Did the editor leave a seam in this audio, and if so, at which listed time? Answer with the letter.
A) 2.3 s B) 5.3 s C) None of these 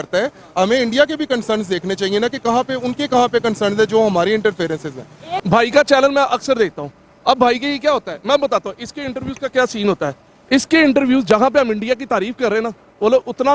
B